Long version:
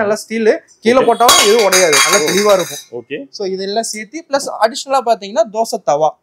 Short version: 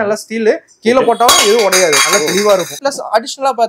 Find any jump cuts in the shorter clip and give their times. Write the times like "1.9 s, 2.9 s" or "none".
2.7 s